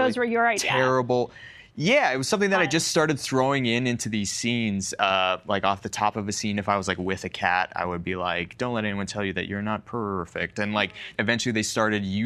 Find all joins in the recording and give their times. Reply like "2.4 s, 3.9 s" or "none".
11.1 s